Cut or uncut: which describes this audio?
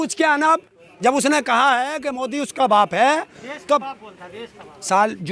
uncut